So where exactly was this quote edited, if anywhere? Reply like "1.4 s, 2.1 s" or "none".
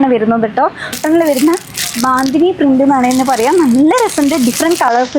0.9 s